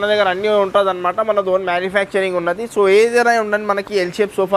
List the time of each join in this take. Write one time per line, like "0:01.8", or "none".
none